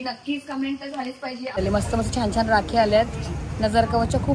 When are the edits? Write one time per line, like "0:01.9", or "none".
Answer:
0:01.6